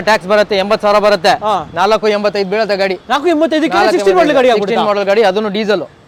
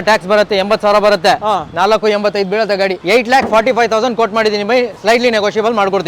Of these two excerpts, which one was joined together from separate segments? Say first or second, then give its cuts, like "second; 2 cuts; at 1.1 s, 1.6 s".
second; 1 cut; at 3.0 s